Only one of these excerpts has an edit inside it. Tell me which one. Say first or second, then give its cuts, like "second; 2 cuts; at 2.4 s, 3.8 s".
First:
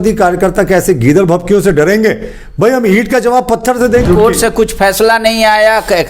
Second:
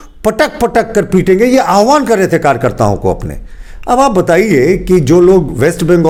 first; 1 cut; at 4.0 s